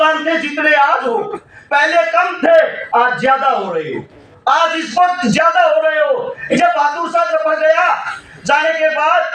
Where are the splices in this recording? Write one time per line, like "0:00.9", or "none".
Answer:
none